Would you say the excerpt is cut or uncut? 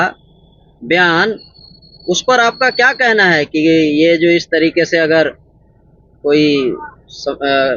uncut